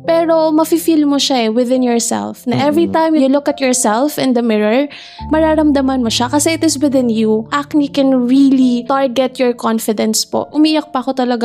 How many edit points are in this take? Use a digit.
5